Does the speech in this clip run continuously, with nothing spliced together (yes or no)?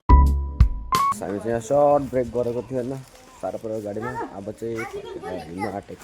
no